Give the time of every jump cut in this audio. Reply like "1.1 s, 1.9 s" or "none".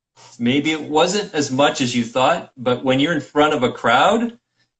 none